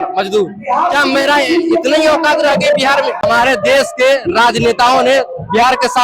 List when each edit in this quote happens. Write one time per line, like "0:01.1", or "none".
0:03.2